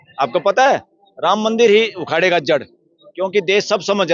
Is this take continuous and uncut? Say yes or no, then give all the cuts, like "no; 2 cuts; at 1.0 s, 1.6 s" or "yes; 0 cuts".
yes; 0 cuts